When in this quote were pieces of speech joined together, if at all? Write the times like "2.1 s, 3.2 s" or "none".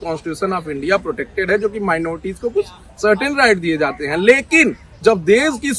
none